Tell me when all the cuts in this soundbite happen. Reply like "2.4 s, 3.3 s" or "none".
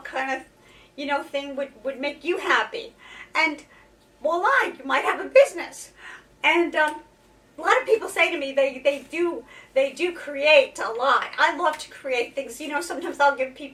none